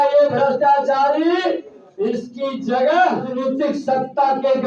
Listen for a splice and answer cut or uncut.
cut